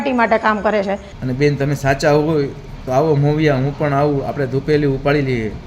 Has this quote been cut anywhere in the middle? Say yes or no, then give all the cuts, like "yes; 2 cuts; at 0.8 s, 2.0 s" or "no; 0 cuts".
yes; 1 cut; at 1.1 s